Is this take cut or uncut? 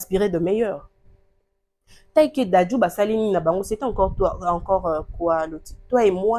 uncut